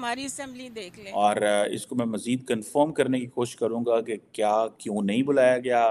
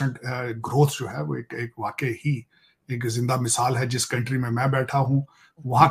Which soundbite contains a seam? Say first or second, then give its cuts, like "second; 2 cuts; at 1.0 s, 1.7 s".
first; 1 cut; at 1.2 s